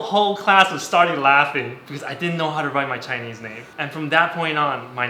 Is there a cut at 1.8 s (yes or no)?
yes